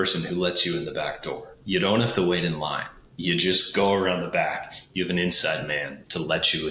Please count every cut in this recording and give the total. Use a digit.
0